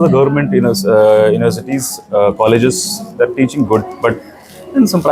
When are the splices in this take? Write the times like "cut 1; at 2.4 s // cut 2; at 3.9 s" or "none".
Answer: none